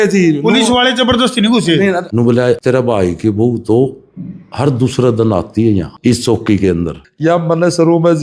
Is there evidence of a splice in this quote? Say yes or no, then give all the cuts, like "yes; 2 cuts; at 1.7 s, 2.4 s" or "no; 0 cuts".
yes; 3 cuts; at 2.1 s, 5.9 s, 7.0 s